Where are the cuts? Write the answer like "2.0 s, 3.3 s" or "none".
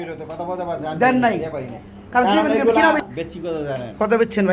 3.1 s